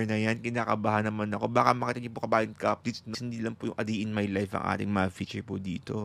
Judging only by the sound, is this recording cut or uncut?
cut